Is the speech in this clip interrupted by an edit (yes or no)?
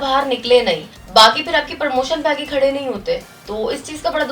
yes